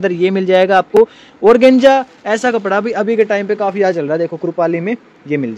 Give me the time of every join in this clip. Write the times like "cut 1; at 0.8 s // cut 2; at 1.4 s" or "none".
none